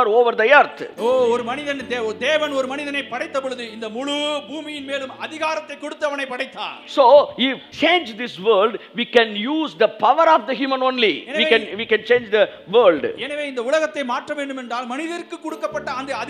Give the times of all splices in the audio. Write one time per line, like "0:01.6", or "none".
0:07.7